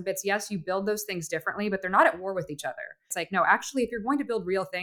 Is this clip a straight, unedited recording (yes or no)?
no